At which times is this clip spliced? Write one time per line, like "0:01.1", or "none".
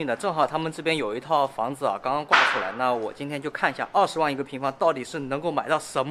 none